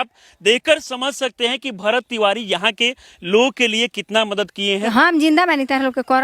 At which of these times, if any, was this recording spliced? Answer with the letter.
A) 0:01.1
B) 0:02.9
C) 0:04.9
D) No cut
C